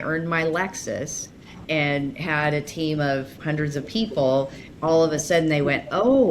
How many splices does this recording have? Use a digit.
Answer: 2